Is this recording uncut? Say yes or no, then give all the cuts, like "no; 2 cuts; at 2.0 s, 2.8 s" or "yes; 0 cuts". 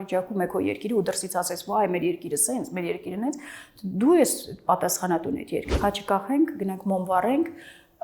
no; 1 cut; at 5.7 s